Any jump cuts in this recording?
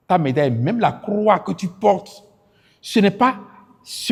no; 0 cuts

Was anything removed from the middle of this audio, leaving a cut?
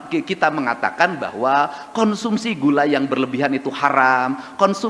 no; 0 cuts

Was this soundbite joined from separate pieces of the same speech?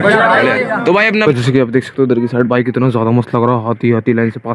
yes; 1 cut; at 1.2 s

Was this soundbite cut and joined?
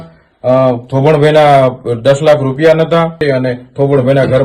yes; 1 cut; at 3.2 s

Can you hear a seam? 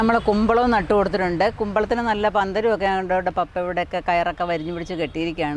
no; 0 cuts

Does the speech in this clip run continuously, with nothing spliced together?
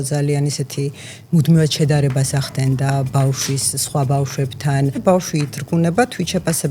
no; 1 cut; at 5.0 s

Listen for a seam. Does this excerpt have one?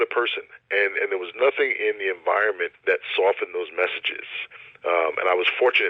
yes; 1 cut; at 2.7 s

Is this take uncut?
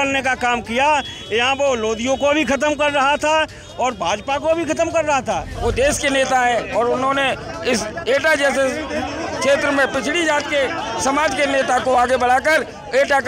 no; 1 cut; at 5.5 s

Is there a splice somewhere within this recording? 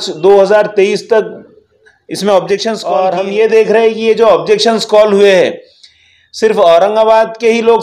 yes; 1 cut; at 2.8 s

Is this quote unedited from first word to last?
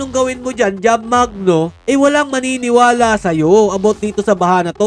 no; 1 cut; at 1.8 s

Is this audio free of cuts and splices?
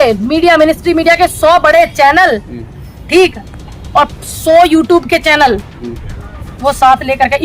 yes; 0 cuts

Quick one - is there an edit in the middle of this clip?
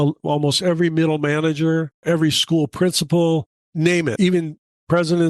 yes; 2 cuts; at 1.9 s, 3.9 s

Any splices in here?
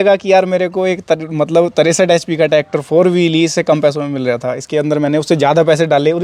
no; 0 cuts

